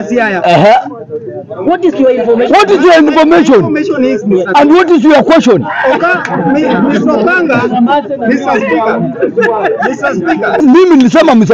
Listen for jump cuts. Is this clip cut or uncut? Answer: cut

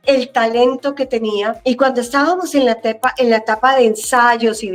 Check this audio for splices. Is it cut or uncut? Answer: uncut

